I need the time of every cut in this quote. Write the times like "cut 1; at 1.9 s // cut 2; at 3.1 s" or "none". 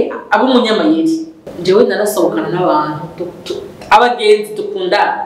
cut 1; at 1.5 s